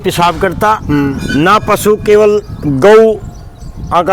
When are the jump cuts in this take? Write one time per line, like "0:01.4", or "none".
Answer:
none